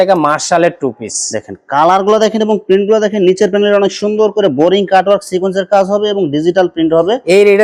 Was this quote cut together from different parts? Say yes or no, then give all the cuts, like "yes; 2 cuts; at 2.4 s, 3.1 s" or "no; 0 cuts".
no; 0 cuts